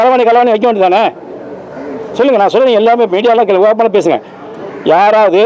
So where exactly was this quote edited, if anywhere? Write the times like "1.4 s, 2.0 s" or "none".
none